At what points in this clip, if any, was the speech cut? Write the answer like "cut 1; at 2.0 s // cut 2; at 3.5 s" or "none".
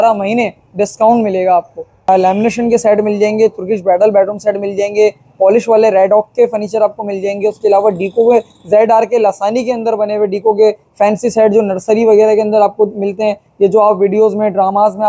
cut 1; at 2.1 s